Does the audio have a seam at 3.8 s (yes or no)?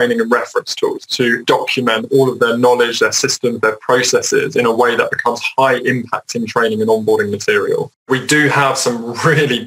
no